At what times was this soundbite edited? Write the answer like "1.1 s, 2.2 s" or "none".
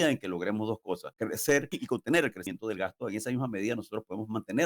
1.1 s, 1.7 s, 2.4 s